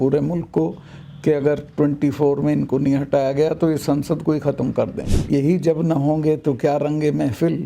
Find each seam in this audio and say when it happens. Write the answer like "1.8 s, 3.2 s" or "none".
5.3 s